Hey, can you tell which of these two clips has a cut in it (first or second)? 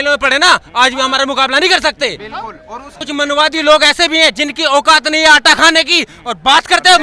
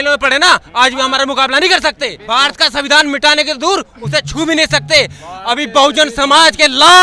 second